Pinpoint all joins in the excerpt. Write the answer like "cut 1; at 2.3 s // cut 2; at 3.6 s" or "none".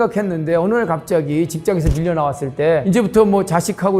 cut 1; at 2.8 s